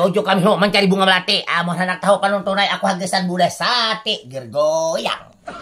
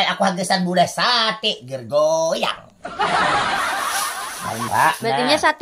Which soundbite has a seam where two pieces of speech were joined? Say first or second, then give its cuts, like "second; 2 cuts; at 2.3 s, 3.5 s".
second; 1 cut; at 4.7 s